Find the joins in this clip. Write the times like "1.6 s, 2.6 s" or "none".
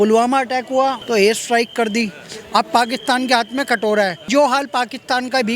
1.0 s, 4.3 s